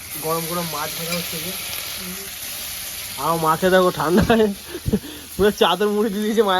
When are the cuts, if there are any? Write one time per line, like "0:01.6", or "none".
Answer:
none